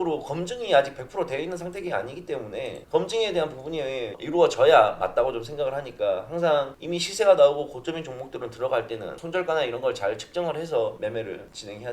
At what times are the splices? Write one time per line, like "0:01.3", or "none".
0:06.8
0:09.2
0:11.0